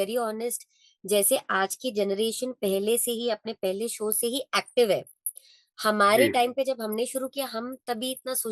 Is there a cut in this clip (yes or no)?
no